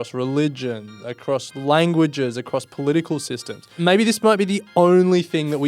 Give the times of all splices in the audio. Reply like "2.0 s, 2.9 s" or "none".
3.8 s